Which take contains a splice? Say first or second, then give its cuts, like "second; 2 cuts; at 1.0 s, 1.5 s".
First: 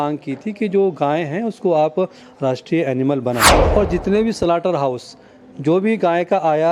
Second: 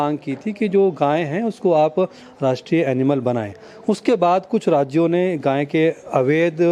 first; 1 cut; at 3.6 s